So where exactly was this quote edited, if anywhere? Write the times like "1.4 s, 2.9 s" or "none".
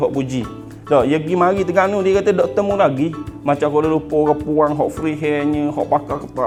none